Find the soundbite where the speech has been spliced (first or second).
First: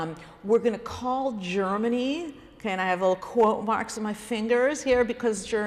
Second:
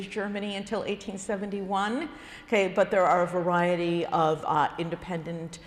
first